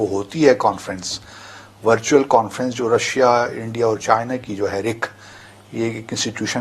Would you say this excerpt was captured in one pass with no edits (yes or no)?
yes